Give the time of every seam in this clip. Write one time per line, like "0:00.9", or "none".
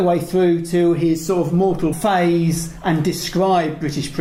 none